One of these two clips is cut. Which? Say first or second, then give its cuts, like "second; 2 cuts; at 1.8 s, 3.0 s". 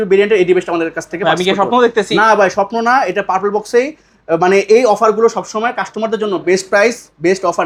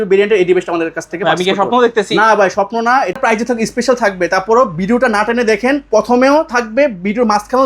second; 1 cut; at 3.2 s